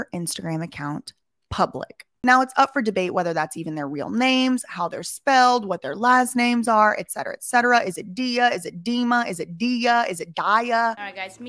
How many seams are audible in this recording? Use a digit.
1